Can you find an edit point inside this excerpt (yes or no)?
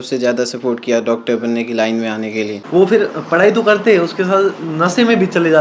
yes